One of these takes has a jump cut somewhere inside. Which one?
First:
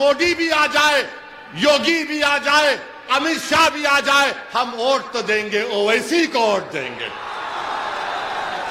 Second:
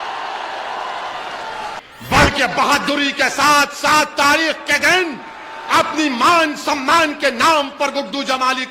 second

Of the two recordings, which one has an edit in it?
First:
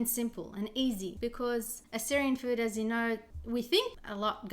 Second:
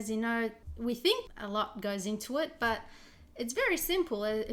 first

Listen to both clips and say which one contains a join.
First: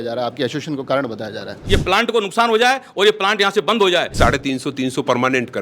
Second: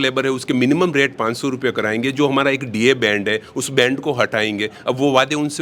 first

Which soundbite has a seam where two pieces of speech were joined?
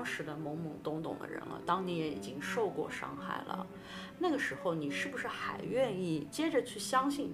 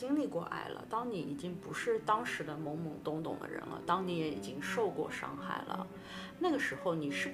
first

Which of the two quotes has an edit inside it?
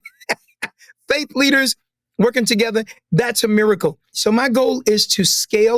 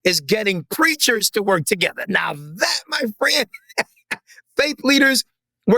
first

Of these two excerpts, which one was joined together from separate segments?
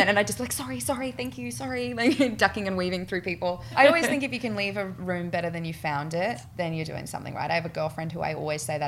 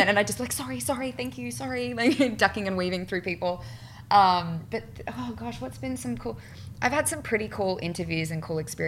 first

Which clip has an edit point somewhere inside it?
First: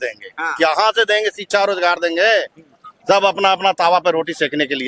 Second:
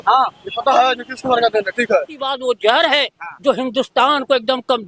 second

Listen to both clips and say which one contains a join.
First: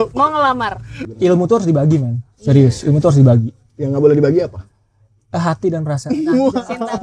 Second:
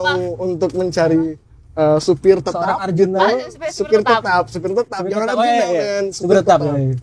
first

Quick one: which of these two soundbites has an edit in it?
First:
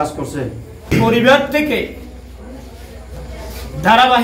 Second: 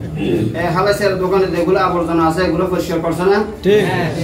first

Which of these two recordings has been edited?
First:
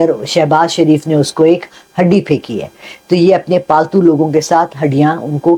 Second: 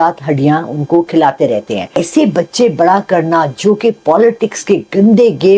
second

